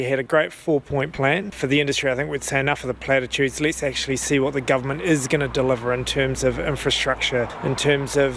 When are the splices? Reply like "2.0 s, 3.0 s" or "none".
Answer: 1.5 s, 7.5 s